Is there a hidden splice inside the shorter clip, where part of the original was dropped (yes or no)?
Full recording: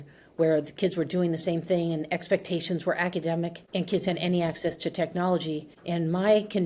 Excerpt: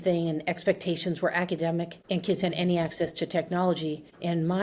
no